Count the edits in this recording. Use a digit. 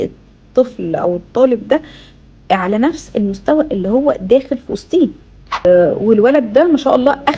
1